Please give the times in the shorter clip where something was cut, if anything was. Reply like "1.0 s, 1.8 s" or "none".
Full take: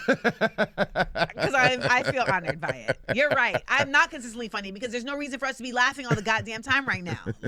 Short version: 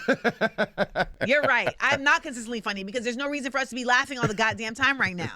1.1 s